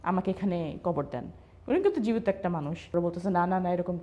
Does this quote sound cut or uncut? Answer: cut